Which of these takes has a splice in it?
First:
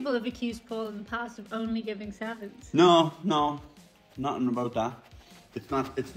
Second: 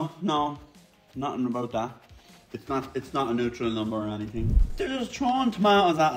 second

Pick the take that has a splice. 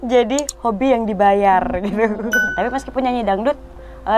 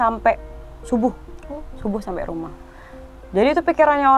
first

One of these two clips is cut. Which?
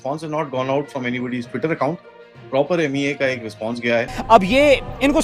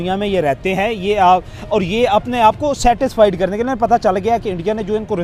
first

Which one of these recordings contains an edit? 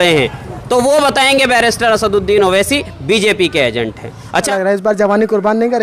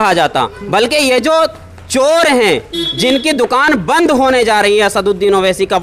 first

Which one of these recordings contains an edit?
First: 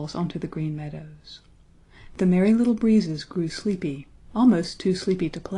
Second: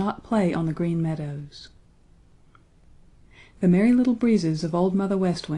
second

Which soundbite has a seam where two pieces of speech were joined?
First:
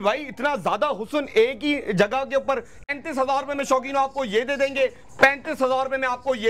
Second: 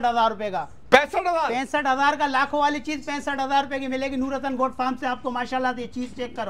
first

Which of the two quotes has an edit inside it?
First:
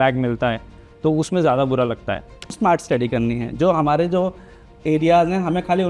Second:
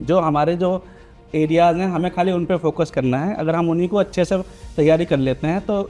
first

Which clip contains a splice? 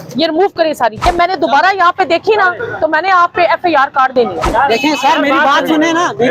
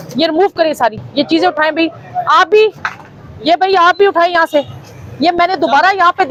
first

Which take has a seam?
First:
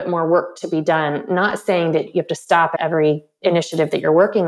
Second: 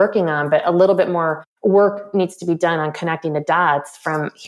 first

